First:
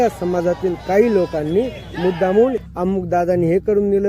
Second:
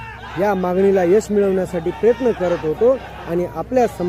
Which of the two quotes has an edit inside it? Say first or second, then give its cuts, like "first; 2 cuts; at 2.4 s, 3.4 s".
first; 1 cut; at 2.6 s